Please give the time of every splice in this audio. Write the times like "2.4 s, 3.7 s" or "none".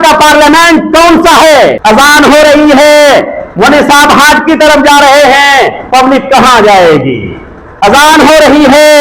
1.8 s